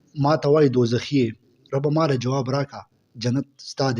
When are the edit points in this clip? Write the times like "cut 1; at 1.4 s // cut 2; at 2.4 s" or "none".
cut 1; at 1.6 s